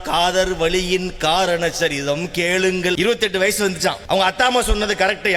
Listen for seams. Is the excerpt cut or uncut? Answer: cut